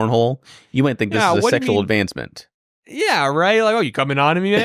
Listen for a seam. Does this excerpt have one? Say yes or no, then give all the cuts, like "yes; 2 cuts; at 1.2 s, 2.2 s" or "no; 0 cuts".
no; 0 cuts